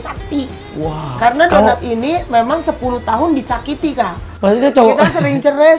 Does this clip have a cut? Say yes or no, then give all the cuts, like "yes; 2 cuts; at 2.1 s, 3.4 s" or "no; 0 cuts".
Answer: yes; 1 cut; at 4.2 s